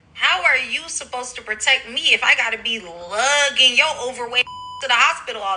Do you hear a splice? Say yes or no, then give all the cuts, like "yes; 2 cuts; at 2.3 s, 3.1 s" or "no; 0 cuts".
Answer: yes; 1 cut; at 4.4 s